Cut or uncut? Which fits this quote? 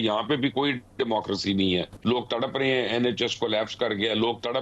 cut